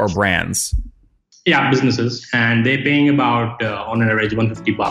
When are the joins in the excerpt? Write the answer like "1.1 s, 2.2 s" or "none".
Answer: 2.2 s